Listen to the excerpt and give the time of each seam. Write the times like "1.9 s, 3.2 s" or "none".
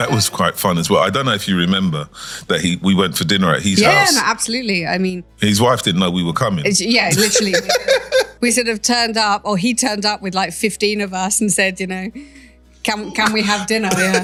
none

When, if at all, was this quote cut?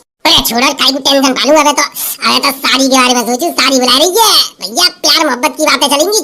none

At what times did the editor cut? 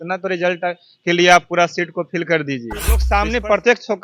3.0 s

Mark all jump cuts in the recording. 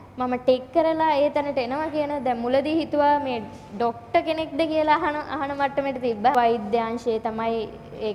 6.3 s

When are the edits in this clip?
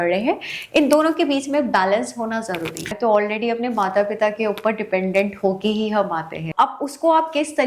2.9 s, 6.4 s

